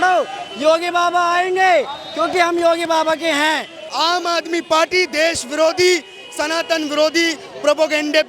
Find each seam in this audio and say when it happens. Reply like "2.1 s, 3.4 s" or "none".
3.8 s